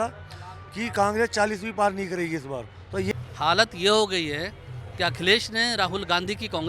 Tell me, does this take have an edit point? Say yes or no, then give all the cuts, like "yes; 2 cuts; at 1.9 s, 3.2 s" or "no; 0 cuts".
yes; 1 cut; at 3.1 s